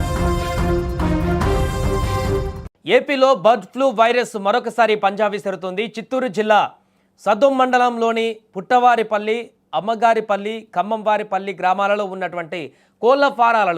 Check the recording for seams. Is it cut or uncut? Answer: cut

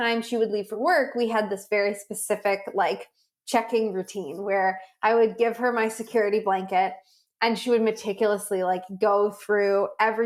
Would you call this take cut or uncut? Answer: uncut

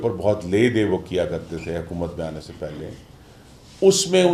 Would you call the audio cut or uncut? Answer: uncut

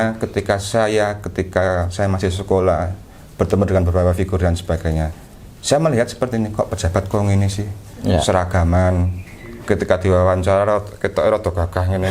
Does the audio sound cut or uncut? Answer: uncut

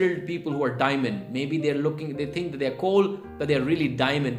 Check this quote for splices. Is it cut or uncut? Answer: uncut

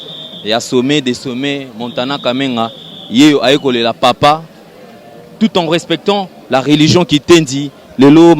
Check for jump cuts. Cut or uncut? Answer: uncut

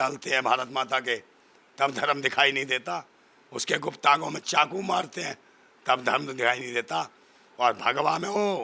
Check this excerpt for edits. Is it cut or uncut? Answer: uncut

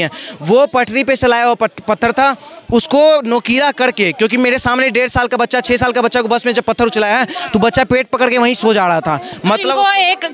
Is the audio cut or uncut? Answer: uncut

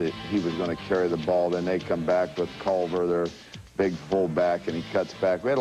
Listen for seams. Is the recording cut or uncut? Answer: uncut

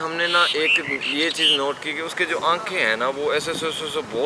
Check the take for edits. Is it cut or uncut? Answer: uncut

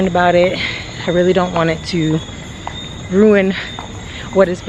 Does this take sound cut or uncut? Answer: uncut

